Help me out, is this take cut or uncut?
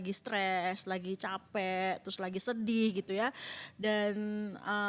uncut